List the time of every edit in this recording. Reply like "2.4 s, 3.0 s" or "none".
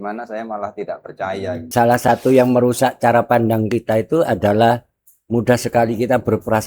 1.6 s